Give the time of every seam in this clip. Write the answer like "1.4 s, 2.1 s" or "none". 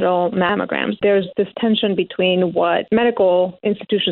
1.0 s, 2.8 s